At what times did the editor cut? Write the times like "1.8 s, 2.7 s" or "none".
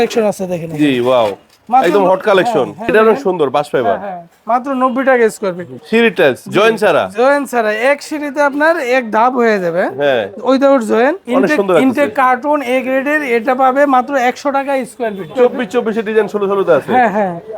2.9 s, 5.7 s, 11.2 s, 15.3 s